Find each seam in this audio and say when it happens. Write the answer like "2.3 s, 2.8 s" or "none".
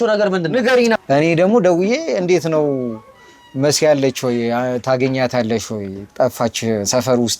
1.0 s